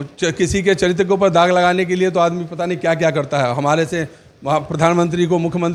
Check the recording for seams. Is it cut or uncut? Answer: uncut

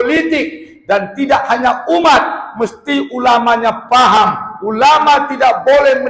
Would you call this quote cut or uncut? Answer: uncut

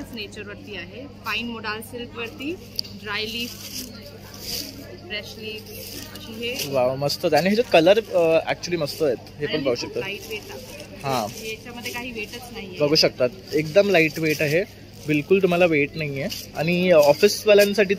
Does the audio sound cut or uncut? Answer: uncut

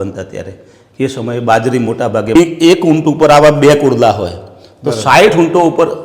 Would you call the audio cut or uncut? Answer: cut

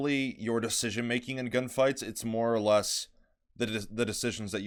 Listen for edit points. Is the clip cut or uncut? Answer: uncut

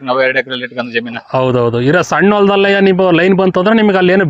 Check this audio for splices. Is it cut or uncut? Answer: uncut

